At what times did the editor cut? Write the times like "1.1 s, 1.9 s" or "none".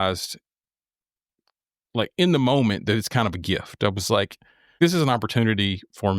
4.8 s